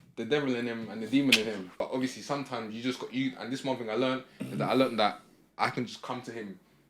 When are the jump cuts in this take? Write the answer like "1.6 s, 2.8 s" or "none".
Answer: 1.8 s